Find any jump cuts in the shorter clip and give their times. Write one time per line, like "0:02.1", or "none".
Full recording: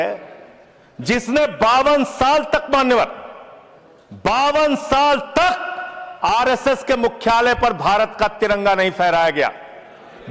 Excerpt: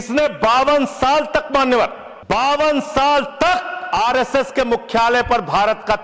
0:02.1
0:03.8